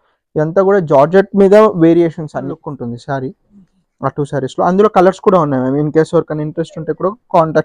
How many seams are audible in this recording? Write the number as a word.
one